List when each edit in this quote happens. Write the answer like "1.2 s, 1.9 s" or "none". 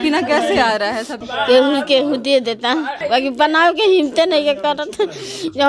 1.2 s, 3.0 s

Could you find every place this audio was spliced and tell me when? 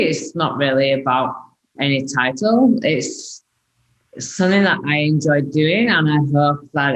1.7 s

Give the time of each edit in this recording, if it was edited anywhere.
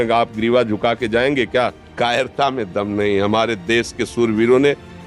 1.8 s

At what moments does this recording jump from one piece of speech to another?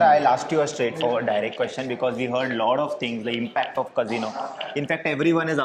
none

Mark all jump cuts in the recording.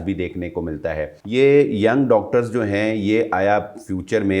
1.2 s

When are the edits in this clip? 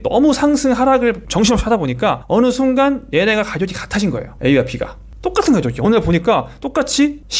none

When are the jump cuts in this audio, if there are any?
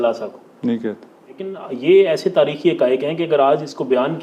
1.6 s

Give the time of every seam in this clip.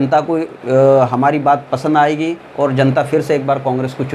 none

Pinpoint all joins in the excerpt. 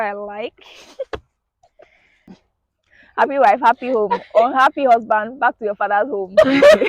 2.3 s

